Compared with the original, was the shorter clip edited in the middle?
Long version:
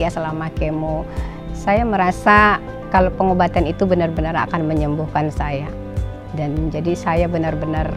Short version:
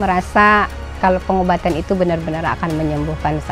no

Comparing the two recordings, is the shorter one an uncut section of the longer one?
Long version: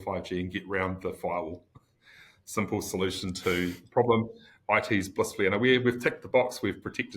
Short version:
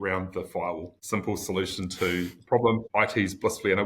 no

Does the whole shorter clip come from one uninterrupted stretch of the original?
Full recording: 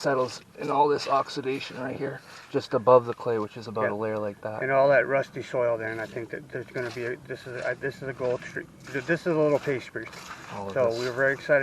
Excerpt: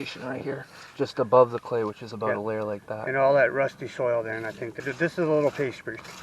no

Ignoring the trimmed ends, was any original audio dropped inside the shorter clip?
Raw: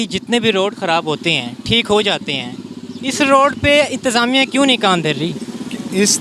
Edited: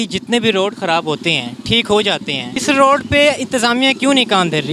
yes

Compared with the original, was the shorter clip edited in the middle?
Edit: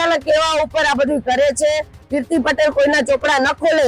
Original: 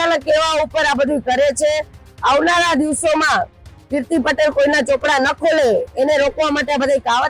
yes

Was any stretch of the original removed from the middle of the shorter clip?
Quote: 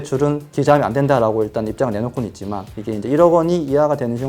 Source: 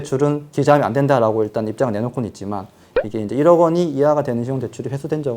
yes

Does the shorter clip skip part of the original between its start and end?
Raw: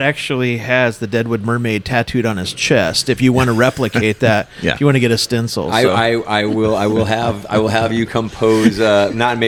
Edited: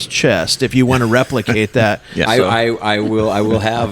yes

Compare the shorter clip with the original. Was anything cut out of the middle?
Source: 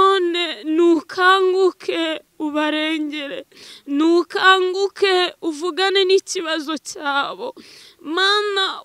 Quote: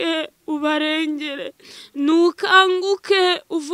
no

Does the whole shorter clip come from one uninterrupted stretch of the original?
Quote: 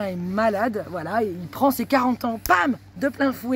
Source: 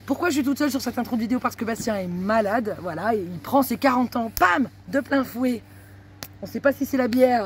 yes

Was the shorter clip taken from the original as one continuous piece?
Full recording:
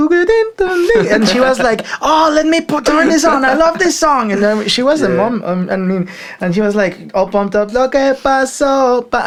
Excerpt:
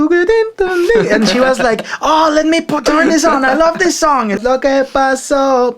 no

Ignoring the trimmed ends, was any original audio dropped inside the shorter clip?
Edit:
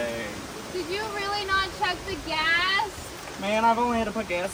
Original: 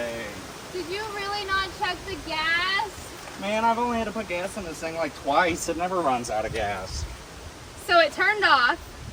no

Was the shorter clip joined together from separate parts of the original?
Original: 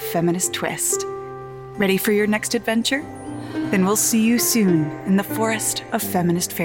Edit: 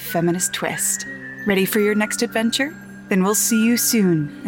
yes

